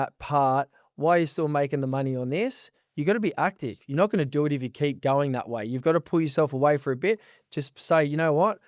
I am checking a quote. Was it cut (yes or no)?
no